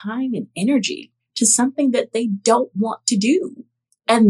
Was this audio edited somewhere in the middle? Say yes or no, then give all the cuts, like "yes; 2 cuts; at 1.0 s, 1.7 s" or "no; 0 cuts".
no; 0 cuts